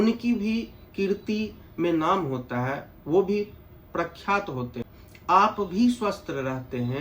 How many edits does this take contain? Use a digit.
1